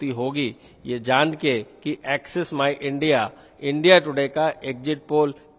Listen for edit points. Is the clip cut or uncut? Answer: uncut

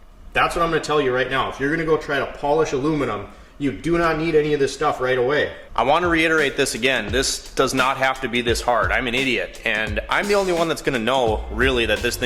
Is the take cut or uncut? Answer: cut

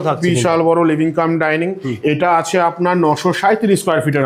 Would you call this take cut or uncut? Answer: uncut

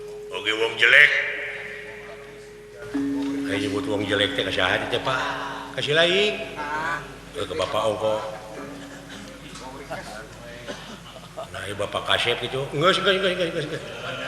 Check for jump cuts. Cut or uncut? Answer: uncut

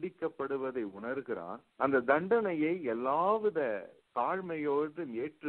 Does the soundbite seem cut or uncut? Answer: cut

